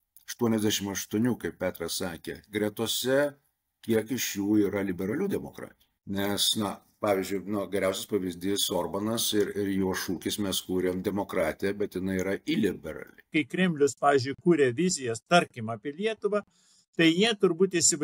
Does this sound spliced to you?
yes; 1 cut; at 13.3 s

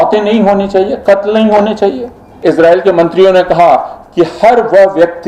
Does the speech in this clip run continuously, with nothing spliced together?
no; 1 cut; at 2.4 s

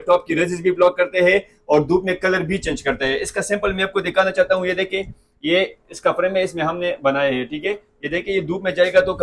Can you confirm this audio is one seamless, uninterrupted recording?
yes; 0 cuts

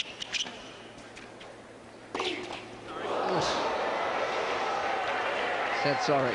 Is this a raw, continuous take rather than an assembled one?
yes; 0 cuts

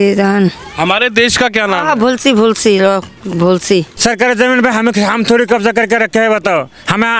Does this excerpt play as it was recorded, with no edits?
no; 1 cut; at 3.9 s

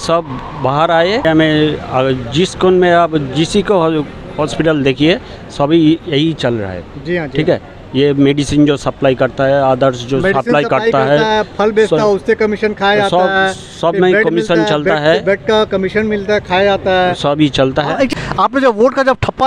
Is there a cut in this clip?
yes; 2 cuts; at 1.2 s, 18.1 s

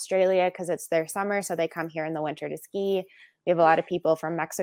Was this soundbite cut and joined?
no; 0 cuts

